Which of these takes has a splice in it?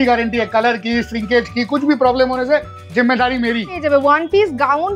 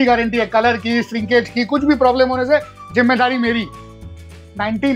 first; 1 cut; at 3.8 s

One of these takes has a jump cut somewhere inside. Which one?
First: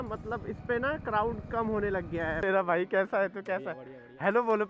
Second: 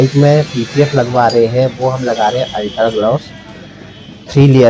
first; 1 cut; at 2.4 s

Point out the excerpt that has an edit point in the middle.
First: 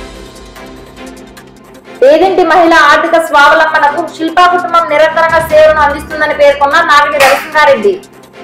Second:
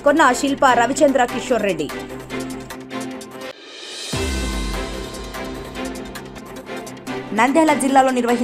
first; 1 cut; at 1.5 s

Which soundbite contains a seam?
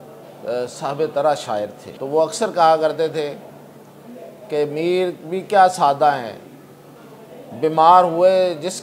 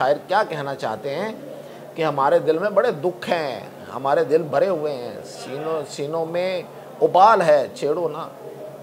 first; 1 cut; at 1.9 s

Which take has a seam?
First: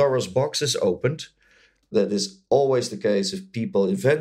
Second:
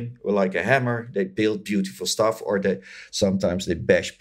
first; 1 cut; at 1.9 s

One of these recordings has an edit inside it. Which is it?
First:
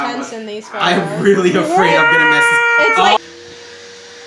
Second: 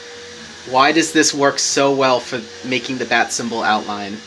first; 1 cut; at 3.2 s

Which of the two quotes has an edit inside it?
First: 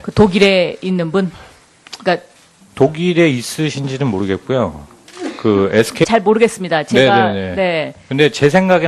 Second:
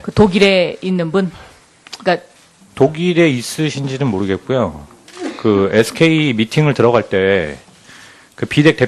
second; 1 cut; at 6.1 s

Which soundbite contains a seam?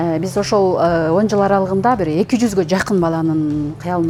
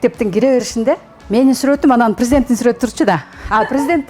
second; 1 cut; at 1.1 s

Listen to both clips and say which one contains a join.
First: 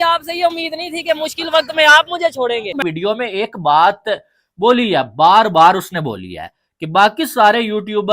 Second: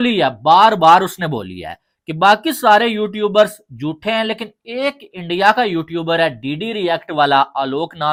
first; 1 cut; at 2.8 s

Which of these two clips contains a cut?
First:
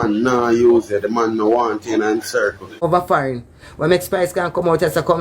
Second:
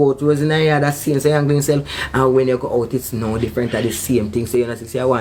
first; 1 cut; at 2.9 s

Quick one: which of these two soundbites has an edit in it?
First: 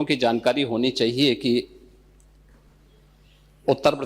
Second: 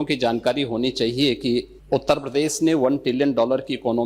second; 1 cut; at 1.8 s

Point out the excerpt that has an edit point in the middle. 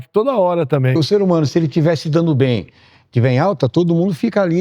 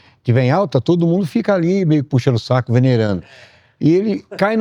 first; 1 cut; at 0.9 s

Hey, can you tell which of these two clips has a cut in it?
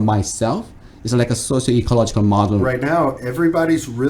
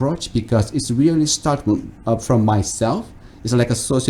first; 1 cut; at 2.6 s

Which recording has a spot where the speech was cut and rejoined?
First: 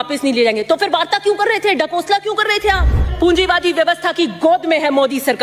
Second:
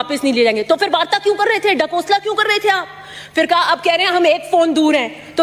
first; 1 cut; at 3.1 s

